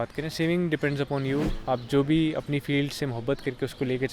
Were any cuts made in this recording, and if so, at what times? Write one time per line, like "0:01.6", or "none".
0:01.5